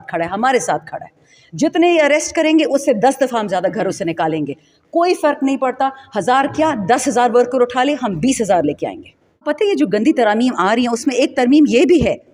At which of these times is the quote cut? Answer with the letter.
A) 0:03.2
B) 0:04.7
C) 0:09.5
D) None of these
C